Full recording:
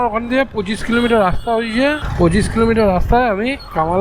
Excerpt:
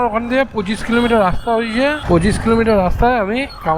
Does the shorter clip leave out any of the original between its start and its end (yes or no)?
yes